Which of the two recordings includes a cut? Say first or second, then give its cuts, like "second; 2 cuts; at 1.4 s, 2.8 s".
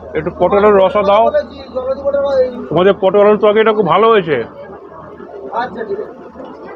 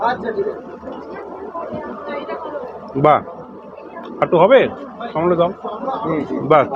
first; 1 cut; at 2.5 s